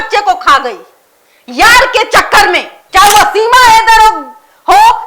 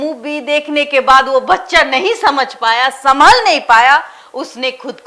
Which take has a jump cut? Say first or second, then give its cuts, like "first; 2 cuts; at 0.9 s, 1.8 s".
first; 1 cut; at 2.7 s